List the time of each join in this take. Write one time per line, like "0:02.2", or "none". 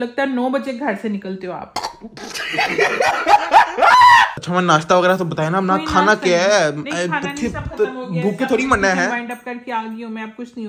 none